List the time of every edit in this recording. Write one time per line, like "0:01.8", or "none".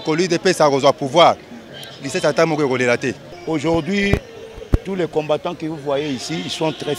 0:03.3

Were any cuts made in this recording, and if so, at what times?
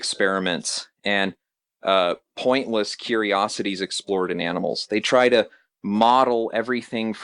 none

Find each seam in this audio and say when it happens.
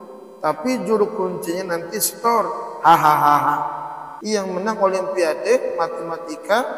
0:04.1

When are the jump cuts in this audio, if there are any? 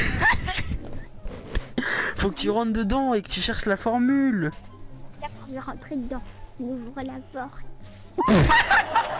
none

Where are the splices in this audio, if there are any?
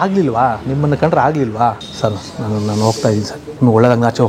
0:01.9
0:03.4

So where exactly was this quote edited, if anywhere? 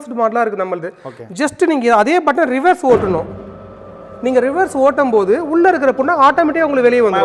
none

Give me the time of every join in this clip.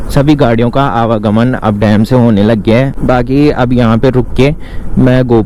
none

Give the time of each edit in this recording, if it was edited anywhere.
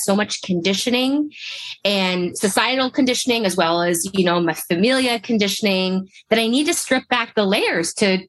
0:02.3

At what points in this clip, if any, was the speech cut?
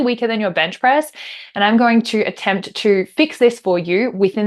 none

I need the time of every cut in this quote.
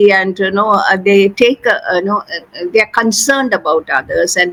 none

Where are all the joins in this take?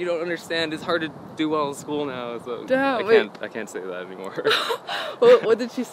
none

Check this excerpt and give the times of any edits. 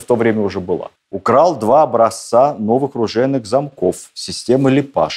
0:01.0

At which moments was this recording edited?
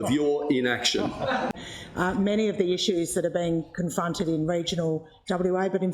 0:01.5

